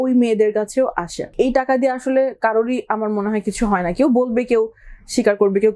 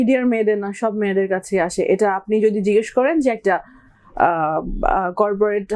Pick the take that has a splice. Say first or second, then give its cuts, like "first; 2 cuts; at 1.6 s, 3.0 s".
first; 1 cut; at 1.3 s